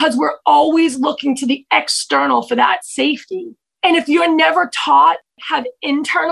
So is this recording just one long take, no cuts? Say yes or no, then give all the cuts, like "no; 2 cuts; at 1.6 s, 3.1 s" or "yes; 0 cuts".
no; 2 cuts; at 3.6 s, 5.3 s